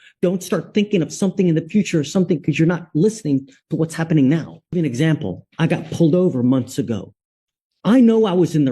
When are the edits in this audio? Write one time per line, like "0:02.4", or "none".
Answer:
0:04.8